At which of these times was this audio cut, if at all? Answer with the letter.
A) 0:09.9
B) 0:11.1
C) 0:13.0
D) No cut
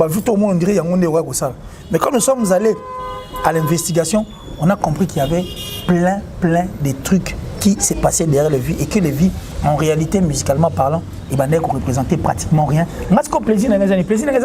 C